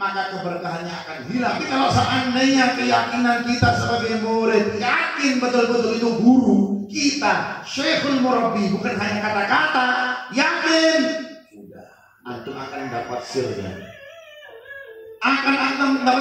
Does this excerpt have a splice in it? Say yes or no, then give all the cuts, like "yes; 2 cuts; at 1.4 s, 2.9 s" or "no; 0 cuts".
yes; 1 cut; at 1.6 s